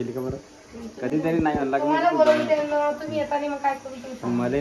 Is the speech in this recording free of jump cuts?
yes; 0 cuts

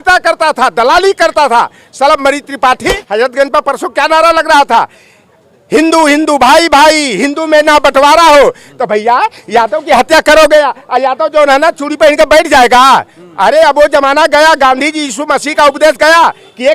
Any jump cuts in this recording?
yes; 1 cut; at 3.0 s

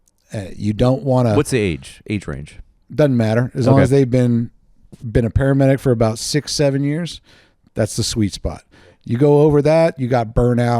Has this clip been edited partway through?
no; 0 cuts

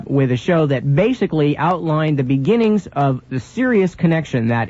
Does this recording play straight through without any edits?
yes; 0 cuts

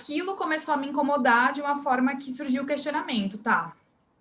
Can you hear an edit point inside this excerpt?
no; 0 cuts

